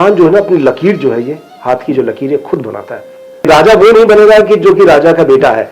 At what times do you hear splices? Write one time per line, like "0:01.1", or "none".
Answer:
0:03.4